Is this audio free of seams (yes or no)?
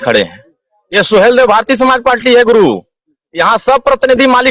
yes